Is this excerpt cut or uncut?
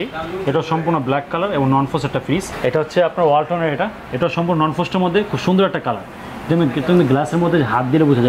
cut